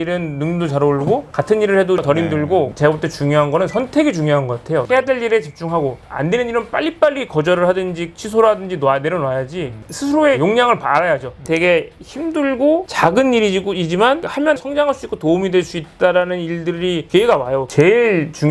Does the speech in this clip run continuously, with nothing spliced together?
no; 5 cuts; at 2.7 s, 4.8 s, 9.7 s, 11.4 s, 17.7 s

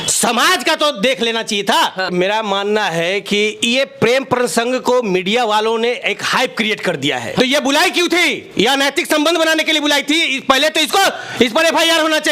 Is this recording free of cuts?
no; 2 cuts; at 2.1 s, 7.4 s

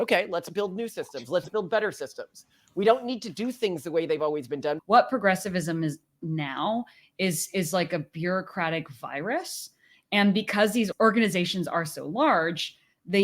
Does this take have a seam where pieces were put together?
yes; 2 cuts; at 4.8 s, 10.9 s

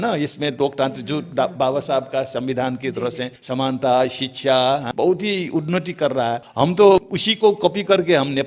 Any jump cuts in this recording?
yes; 4 cuts; at 3.3 s, 4.9 s, 6.5 s, 7.2 s

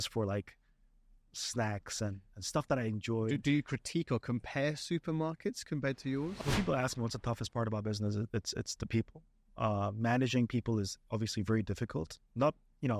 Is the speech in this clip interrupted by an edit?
yes; 1 cut; at 6.3 s

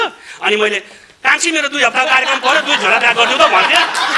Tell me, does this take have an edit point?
no; 0 cuts

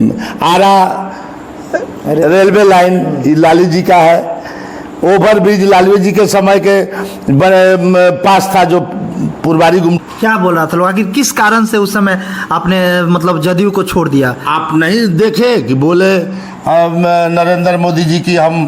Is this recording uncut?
no; 1 cut; at 10.0 s

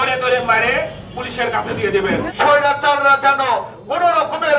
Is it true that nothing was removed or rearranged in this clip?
no; 1 cut; at 2.2 s

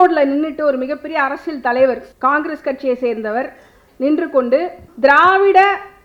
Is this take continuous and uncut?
no; 2 cuts; at 2.1 s, 4.8 s

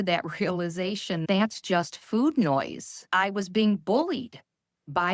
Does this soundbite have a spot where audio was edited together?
yes; 2 cuts; at 1.2 s, 3.1 s

